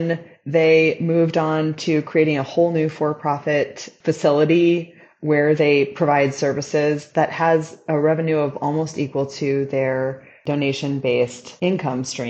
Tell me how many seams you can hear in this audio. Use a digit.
3